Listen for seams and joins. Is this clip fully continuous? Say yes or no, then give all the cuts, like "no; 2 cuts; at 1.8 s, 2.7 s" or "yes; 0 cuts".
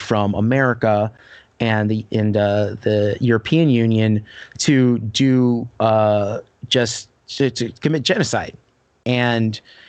yes; 0 cuts